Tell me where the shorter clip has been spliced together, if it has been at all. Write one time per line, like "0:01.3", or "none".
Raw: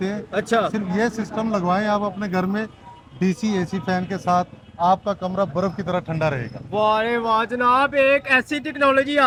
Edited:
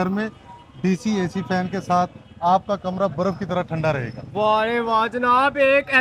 none